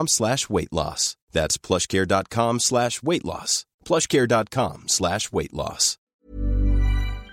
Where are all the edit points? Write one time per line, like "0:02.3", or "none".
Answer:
0:06.2